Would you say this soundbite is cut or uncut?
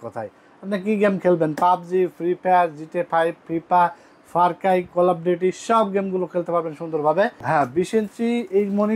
cut